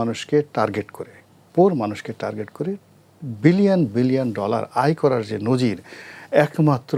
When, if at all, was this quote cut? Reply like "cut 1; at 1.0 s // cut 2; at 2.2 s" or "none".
none